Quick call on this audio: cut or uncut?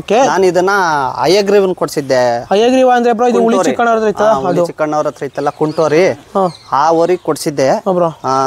uncut